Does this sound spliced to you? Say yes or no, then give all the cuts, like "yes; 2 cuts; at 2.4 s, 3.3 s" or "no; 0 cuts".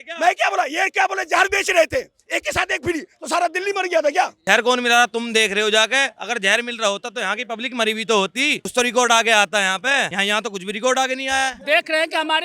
yes; 4 cuts; at 4.4 s, 8.7 s, 10.1 s, 11.6 s